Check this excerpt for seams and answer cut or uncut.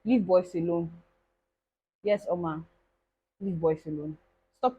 uncut